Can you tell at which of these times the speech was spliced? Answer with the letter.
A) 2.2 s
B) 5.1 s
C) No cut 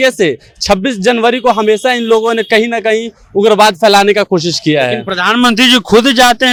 C